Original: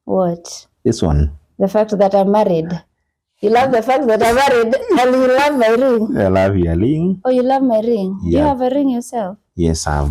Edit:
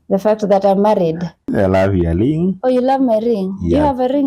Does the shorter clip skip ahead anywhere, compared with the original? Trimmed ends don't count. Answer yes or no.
yes